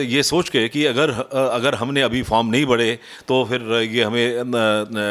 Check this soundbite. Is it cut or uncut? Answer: uncut